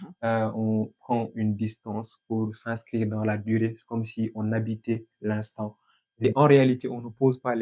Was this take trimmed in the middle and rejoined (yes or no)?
yes